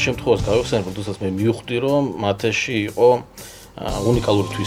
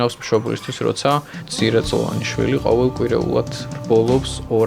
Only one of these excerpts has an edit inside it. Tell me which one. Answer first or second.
second